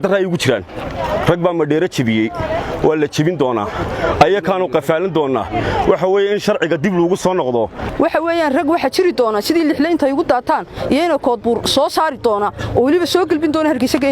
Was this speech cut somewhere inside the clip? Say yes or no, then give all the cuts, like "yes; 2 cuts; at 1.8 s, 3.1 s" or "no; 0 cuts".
yes; 1 cut; at 7.8 s